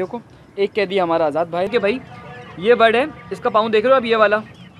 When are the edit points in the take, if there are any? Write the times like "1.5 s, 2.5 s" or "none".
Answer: 1.7 s